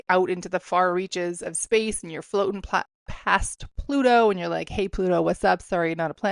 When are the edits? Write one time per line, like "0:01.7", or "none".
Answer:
none